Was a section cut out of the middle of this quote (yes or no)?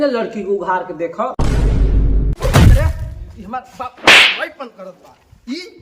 yes